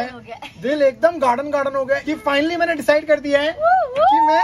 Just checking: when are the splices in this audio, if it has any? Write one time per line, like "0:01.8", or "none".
0:02.1

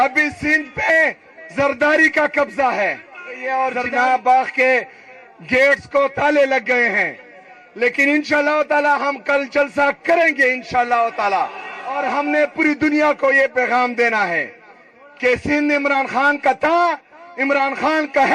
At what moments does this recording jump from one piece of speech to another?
0:03.4
0:12.0

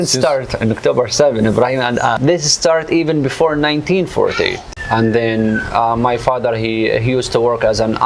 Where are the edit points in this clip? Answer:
0:02.2
0:04.7

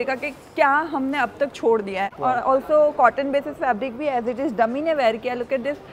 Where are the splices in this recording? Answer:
0:02.1

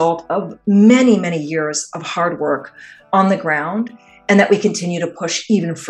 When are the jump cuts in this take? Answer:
none

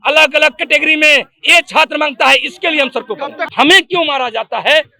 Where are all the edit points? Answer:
0:03.4

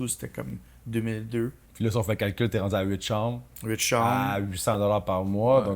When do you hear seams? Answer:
0:01.6

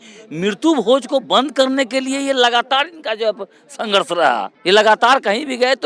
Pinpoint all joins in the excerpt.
0:04.5

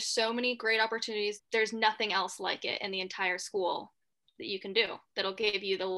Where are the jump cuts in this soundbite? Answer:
0:01.4

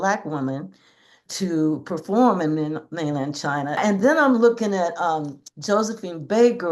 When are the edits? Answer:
0:03.8

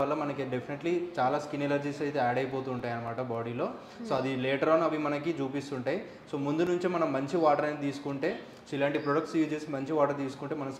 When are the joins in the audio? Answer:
none

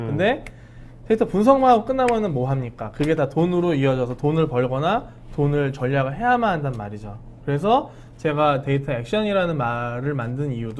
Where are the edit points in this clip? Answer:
none

